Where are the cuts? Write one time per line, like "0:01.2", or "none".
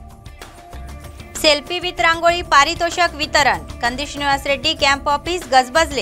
0:01.1